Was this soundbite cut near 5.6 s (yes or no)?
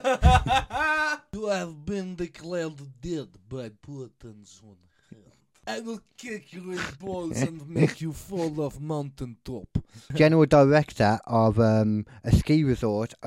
yes